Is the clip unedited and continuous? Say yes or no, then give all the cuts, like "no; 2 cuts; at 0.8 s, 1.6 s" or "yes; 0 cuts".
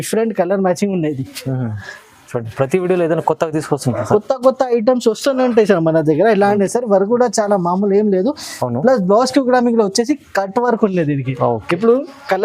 no; 1 cut; at 6.6 s